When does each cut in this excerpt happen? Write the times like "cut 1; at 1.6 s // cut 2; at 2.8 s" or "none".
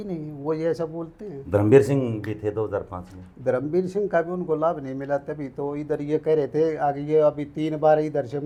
none